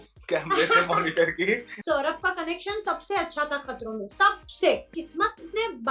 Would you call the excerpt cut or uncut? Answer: cut